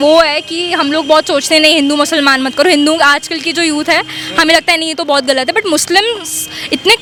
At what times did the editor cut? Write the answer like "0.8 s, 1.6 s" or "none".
none